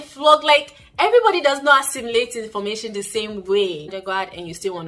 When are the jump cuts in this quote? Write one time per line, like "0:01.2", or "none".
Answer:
0:03.9